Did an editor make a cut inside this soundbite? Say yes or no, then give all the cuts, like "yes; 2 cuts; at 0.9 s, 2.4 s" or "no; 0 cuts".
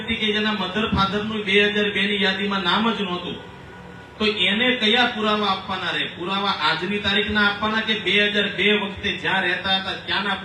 no; 0 cuts